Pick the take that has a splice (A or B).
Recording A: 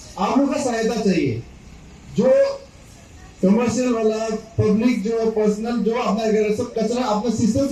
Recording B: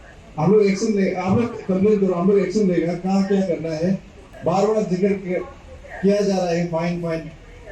B